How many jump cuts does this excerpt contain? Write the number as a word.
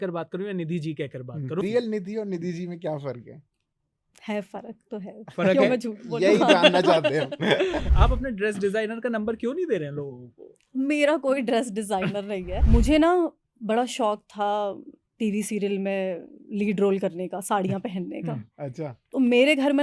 three